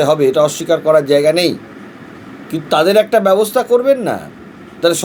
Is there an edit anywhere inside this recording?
no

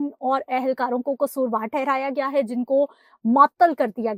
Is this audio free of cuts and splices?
yes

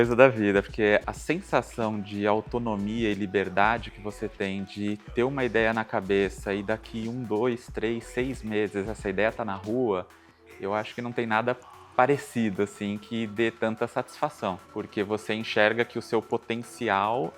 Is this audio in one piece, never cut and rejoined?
no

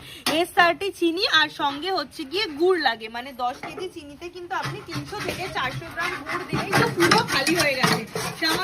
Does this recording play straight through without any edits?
no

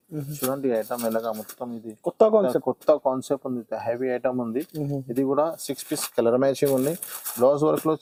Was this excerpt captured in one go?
yes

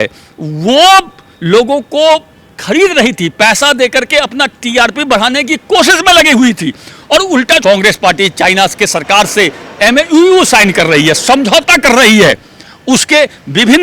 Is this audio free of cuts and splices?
no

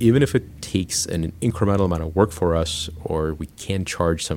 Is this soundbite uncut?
no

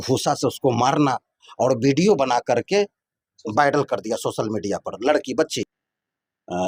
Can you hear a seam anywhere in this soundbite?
no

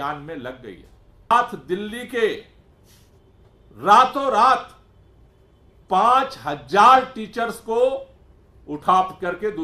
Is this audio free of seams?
no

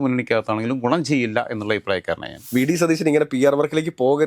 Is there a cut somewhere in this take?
yes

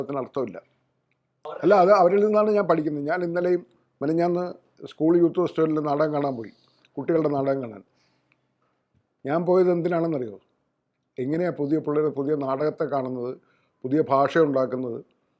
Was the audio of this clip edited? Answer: yes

